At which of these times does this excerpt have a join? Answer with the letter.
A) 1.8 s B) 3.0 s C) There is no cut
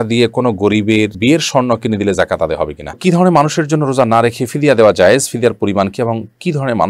B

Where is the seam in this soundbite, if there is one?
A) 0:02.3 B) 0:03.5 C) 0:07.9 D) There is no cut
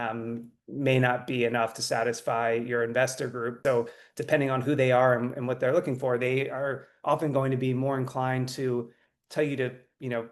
B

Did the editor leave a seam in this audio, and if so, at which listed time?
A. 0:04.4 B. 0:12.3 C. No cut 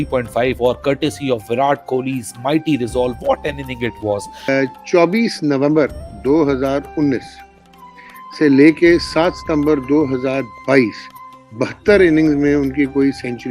A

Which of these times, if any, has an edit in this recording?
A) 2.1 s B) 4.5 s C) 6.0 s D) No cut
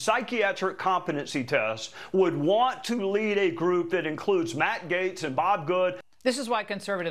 C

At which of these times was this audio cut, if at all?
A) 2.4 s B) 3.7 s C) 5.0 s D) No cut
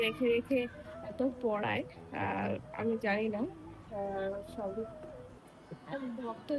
D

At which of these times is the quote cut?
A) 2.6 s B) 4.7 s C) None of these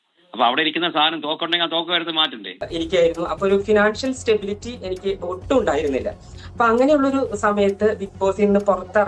A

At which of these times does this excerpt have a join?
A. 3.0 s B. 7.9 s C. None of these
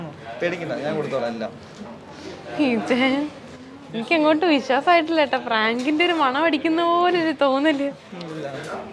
C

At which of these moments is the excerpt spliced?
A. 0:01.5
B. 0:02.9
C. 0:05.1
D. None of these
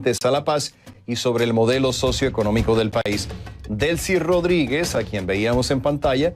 C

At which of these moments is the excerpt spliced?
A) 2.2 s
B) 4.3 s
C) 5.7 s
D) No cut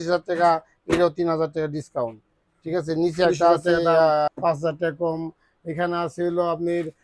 B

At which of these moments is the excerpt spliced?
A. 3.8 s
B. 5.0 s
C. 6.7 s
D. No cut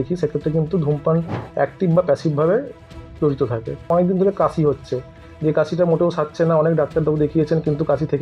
A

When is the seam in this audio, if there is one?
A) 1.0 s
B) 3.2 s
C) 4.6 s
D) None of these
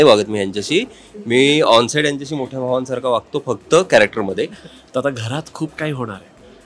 C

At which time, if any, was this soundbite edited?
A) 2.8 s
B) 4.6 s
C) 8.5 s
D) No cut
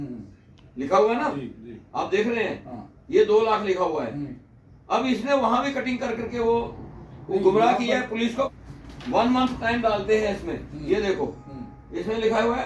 C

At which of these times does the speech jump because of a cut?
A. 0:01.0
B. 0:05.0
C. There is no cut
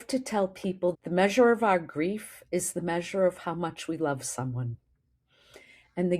A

